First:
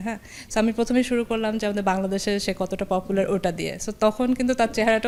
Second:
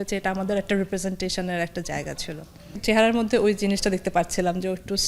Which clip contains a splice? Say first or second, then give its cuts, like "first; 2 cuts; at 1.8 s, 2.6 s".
second; 1 cut; at 2.8 s